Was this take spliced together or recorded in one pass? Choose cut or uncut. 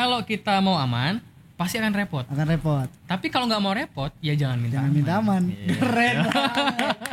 uncut